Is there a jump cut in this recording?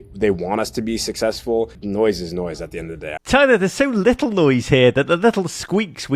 yes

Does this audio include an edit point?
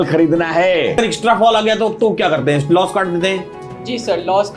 yes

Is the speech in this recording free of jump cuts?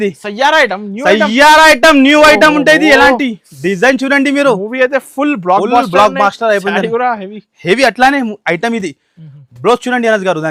yes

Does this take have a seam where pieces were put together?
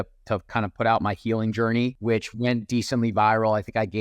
yes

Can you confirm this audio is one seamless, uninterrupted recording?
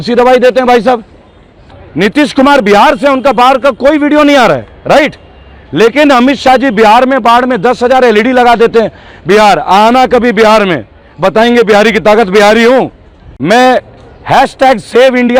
yes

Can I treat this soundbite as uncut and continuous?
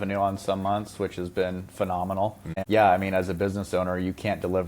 no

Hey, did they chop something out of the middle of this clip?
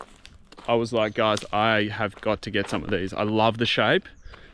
no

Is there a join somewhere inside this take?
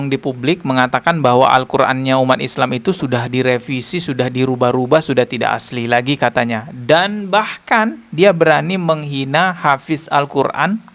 no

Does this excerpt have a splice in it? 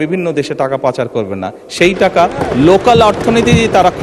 no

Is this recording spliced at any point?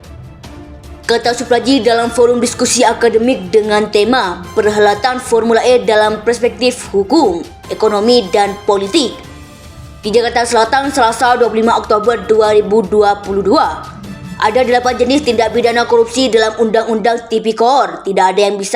yes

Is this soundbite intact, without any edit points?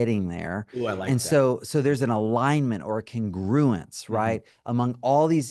yes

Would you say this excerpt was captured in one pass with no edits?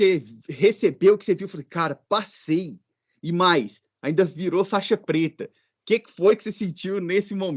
yes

